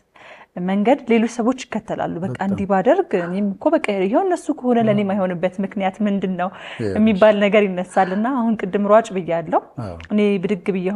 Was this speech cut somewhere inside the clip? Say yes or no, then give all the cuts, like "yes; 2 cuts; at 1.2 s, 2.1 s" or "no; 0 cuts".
no; 0 cuts